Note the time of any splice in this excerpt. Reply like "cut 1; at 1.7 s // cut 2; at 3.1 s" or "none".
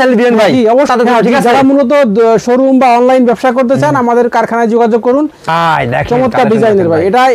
cut 1; at 0.9 s // cut 2; at 5.5 s

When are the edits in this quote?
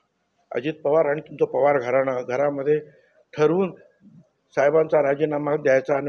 none

